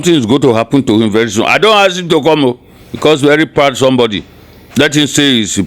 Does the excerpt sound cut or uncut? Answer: uncut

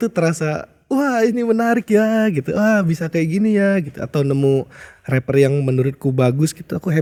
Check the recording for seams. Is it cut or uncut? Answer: uncut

